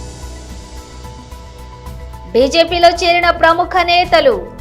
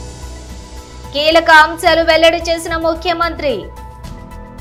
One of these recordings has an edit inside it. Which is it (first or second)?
first